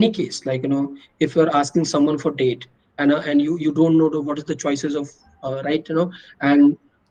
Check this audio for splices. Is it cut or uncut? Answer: uncut